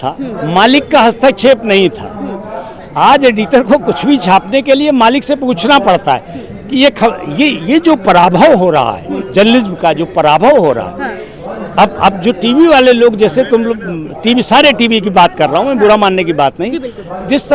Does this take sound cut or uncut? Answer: uncut